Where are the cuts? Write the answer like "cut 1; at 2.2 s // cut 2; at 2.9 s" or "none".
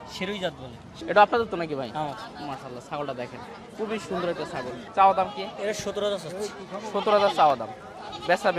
cut 1; at 0.9 s // cut 2; at 4.8 s

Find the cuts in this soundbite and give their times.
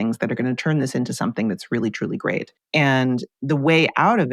cut 1; at 2.6 s

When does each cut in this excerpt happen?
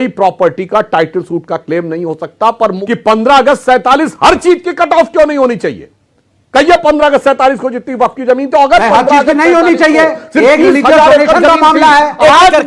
cut 1; at 2.8 s

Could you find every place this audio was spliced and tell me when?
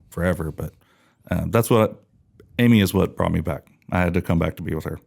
none

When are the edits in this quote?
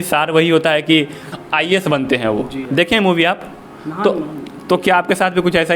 cut 1; at 1.2 s // cut 2; at 2.6 s

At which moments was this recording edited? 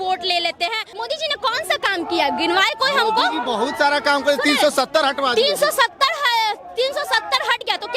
cut 1; at 1.0 s

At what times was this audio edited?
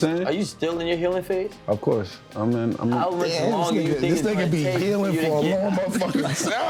none

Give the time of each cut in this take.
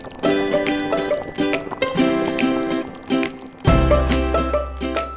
none

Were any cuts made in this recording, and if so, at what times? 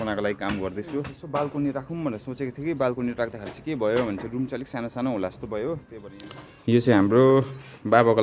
cut 1; at 1.2 s // cut 2; at 6.0 s

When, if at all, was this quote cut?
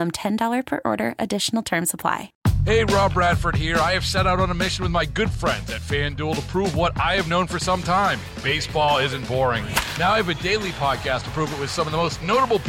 cut 1; at 2.3 s

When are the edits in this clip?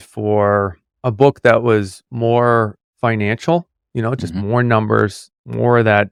none

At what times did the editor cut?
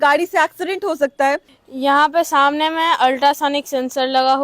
cut 1; at 1.5 s

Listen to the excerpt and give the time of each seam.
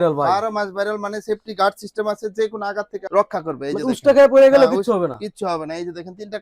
none

